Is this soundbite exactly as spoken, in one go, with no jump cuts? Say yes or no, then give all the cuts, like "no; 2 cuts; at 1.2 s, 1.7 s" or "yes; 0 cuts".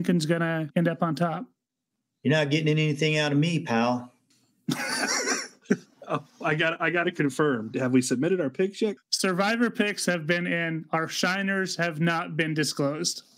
no; 2 cuts; at 7.7 s, 8.9 s